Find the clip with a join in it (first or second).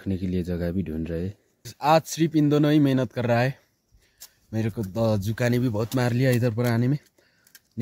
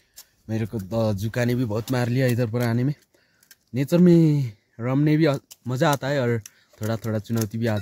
first